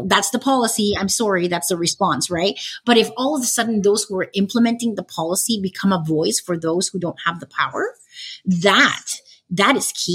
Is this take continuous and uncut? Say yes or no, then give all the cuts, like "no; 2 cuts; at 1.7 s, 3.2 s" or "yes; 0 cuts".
yes; 0 cuts